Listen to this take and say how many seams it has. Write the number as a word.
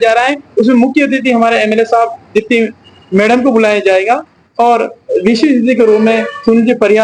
zero